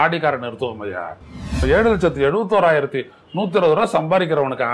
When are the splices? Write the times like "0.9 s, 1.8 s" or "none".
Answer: 1.6 s